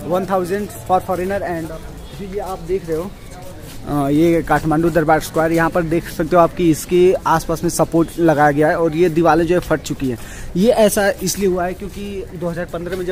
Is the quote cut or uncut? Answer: cut